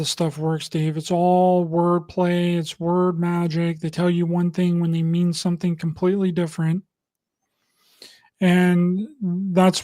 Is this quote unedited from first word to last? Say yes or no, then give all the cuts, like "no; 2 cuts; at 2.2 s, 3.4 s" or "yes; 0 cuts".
yes; 0 cuts